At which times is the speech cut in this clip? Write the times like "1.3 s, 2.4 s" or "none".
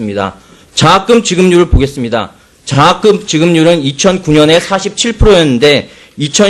5.6 s